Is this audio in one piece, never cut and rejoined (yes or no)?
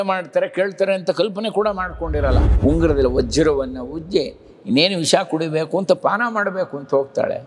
no